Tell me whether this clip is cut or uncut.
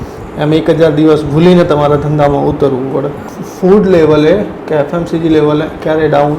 cut